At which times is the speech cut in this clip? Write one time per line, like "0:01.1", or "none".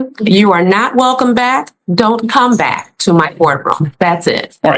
none